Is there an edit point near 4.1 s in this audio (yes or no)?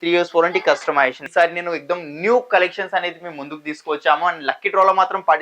no